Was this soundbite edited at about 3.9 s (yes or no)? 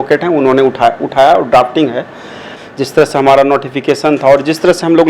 no